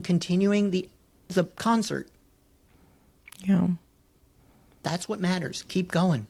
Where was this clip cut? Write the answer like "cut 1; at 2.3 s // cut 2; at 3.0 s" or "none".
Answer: none